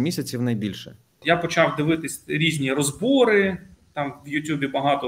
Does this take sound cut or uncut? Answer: cut